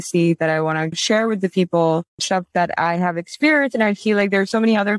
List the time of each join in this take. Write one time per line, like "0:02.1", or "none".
0:01.0
0:02.1